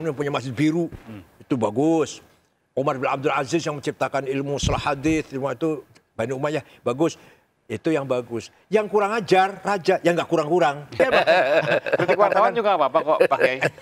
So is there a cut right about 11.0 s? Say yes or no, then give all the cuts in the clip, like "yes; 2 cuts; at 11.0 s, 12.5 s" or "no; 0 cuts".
yes; 1 cut; at 11.0 s